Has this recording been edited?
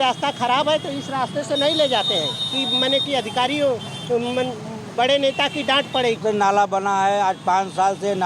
yes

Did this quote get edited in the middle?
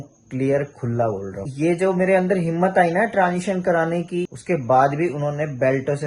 yes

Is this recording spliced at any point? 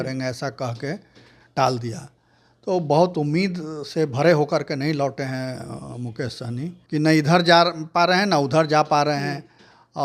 yes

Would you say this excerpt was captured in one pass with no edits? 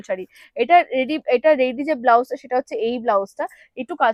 yes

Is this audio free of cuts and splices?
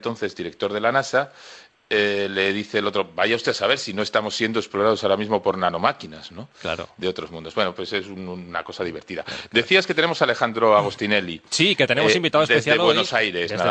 yes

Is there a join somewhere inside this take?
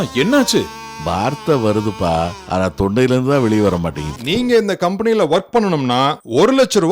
yes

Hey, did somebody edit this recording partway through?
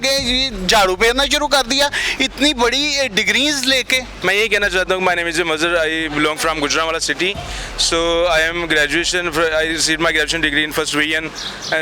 yes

